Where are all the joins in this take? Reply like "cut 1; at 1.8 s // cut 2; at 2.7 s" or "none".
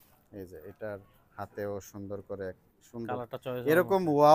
cut 1; at 2.8 s